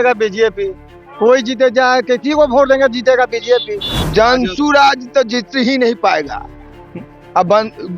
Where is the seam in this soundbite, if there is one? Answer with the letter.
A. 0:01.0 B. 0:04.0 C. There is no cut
B